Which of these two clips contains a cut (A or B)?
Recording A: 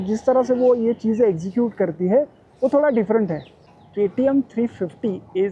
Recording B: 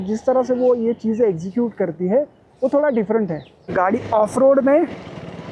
B